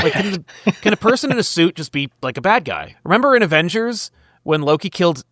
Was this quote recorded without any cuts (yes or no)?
no